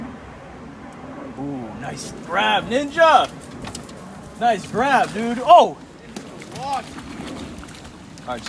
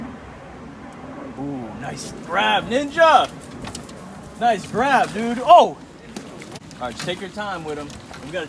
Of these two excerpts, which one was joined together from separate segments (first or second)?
second